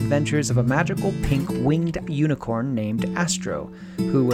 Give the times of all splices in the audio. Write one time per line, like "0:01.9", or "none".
none

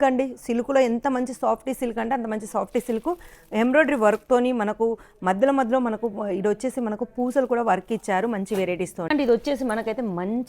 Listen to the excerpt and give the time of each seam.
0:09.1

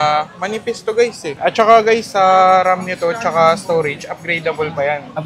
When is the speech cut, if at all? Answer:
0:01.3

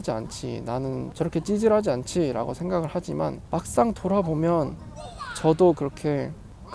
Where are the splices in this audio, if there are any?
0:03.4

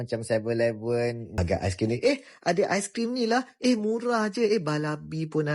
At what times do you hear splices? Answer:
0:01.4

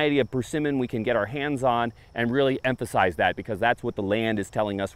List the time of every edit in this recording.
none

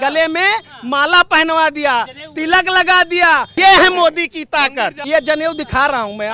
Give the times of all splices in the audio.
0:03.5
0:05.0

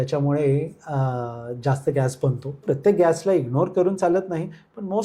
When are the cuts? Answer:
0:02.6

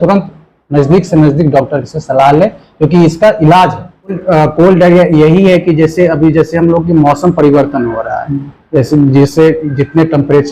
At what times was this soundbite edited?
0:04.2

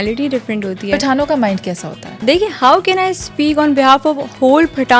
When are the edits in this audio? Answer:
0:02.1

